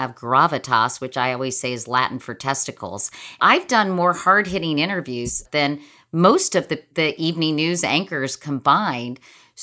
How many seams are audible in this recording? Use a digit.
3